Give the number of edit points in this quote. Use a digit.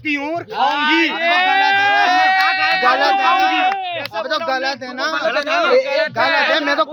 0